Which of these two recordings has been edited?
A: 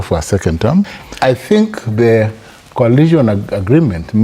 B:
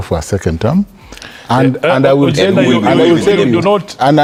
A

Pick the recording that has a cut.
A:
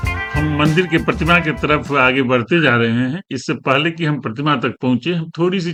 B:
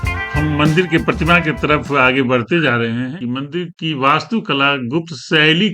B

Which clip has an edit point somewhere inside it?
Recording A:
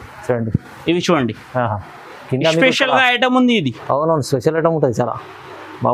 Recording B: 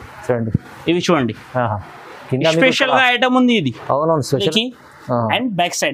B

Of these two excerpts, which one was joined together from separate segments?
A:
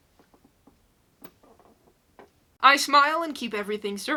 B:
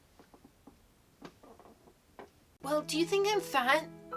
B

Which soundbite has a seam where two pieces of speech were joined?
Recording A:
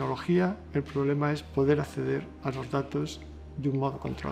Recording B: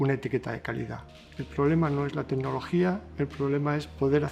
B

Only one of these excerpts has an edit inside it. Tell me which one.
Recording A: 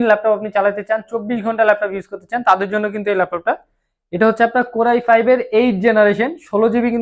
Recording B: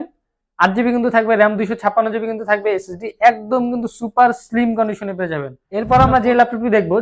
B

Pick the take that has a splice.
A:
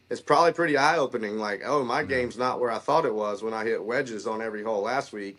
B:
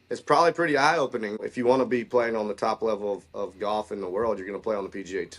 B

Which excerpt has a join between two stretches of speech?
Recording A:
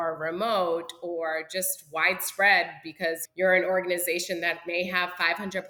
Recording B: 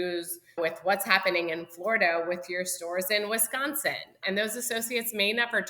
B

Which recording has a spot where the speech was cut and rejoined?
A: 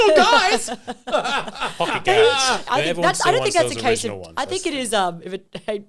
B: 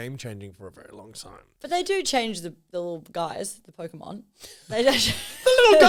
A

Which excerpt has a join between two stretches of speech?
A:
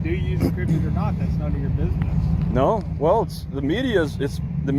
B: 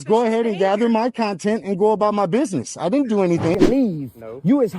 B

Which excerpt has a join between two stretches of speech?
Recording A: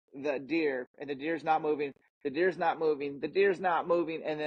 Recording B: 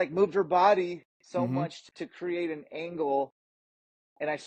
B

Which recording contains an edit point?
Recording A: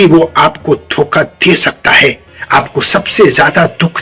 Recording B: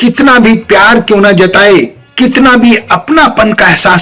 A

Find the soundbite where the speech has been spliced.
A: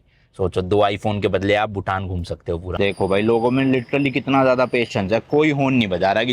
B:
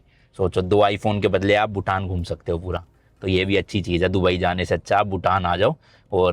A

